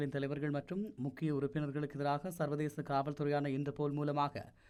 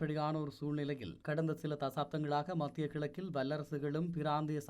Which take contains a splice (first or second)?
second